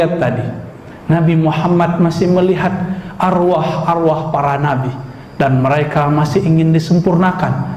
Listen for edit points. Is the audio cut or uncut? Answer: uncut